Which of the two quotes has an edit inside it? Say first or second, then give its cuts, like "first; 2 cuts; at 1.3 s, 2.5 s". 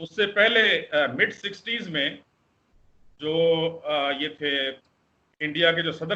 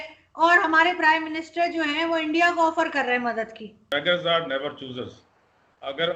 second; 1 cut; at 3.8 s